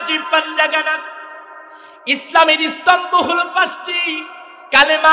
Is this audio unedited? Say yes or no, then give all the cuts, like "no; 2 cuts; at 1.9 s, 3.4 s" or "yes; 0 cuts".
yes; 0 cuts